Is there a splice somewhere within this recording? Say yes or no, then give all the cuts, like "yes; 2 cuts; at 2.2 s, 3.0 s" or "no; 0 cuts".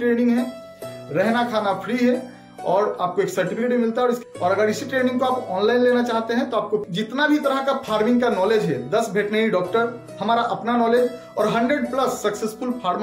yes; 2 cuts; at 4.3 s, 6.8 s